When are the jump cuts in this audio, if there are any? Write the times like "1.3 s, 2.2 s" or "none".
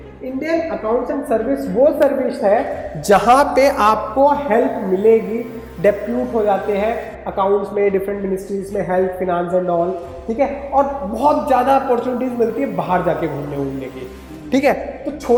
none